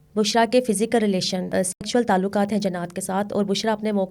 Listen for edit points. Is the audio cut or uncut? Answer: cut